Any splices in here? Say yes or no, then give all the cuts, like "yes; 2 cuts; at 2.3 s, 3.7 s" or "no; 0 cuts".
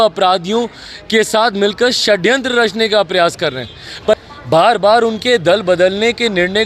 yes; 1 cut; at 4.2 s